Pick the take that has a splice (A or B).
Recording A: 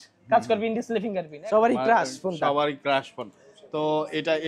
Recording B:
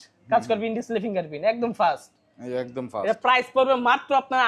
A